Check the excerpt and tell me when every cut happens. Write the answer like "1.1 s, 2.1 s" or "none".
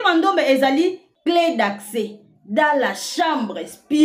1.1 s